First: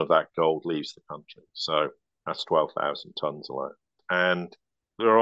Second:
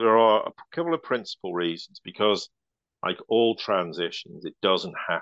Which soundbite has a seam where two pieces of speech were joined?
first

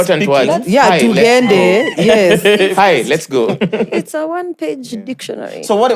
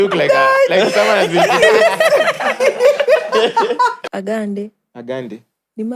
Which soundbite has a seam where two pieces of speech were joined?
second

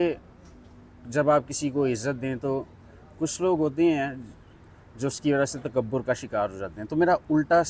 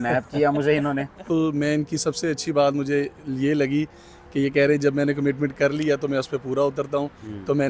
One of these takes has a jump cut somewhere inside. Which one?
second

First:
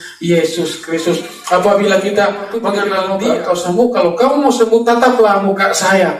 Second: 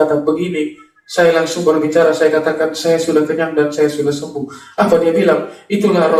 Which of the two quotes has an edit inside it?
first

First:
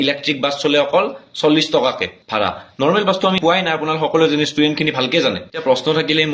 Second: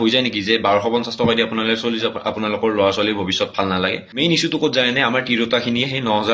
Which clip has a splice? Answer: second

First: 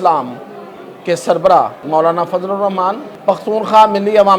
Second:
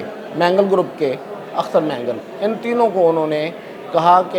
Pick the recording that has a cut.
first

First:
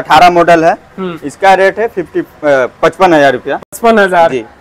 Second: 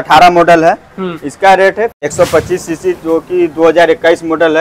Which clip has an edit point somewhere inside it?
second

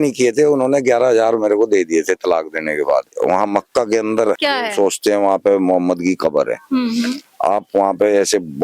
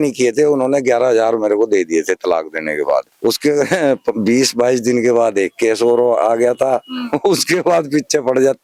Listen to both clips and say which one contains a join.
first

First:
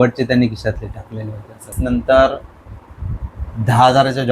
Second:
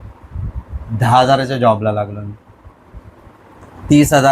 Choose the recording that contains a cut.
first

